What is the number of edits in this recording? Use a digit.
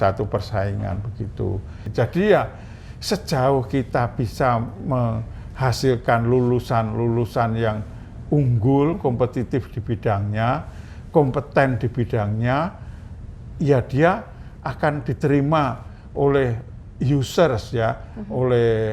1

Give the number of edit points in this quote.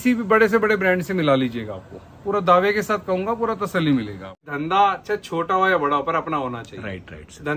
1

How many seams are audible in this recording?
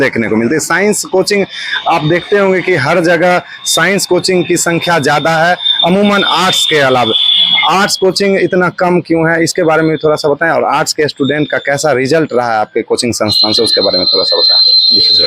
0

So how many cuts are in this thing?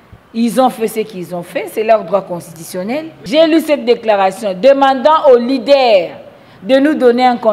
1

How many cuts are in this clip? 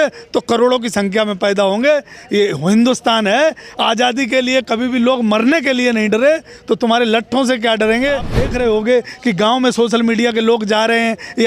1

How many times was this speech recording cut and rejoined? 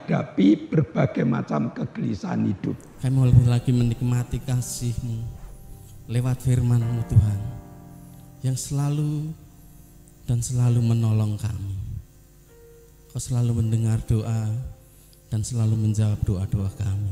1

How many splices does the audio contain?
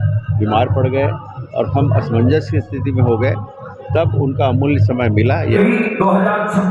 1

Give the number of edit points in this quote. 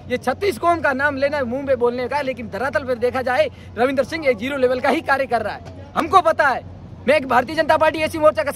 0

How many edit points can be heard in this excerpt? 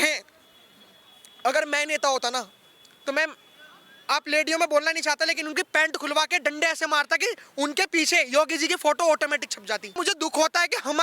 1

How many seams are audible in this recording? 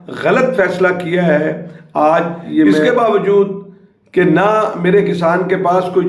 1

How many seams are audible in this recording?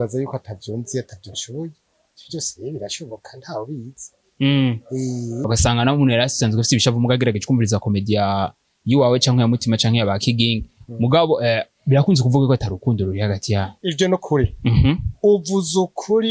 2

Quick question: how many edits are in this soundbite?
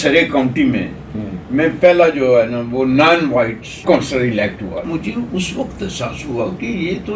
2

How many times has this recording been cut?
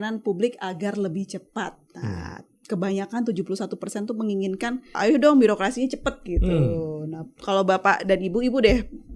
2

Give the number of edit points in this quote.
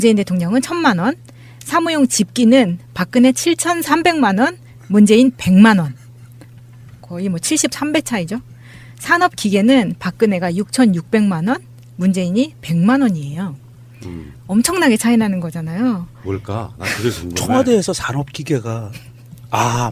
1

